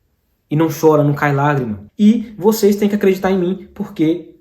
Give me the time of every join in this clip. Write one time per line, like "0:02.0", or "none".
0:01.8